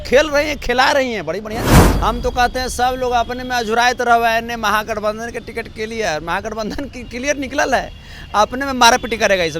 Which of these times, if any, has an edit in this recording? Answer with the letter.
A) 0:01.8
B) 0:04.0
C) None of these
A